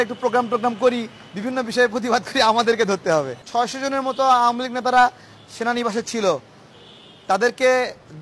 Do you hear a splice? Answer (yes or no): yes